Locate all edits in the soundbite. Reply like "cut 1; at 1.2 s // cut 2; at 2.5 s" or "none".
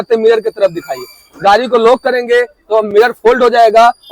none